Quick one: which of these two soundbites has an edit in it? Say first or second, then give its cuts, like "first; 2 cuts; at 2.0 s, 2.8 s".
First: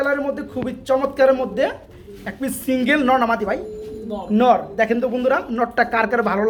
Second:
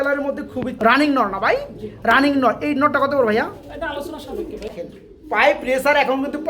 second; 2 cuts; at 0.9 s, 4.6 s